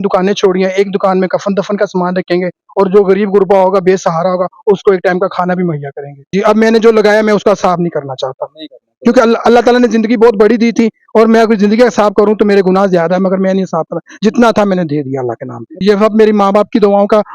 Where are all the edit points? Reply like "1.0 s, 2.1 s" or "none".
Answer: 6.3 s, 15.7 s